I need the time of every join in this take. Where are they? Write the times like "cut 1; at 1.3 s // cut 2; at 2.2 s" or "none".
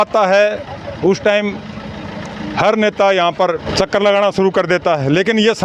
cut 1; at 3.6 s